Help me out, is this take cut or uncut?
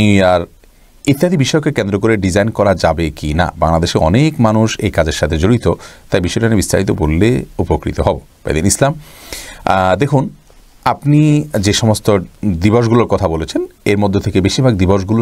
uncut